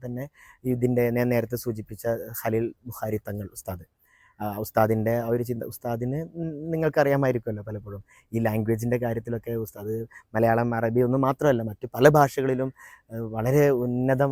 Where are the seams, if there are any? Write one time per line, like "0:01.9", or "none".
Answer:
none